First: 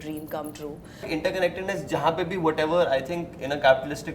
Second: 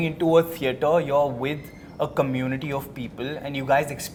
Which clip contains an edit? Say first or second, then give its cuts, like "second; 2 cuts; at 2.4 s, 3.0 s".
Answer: first; 1 cut; at 1.0 s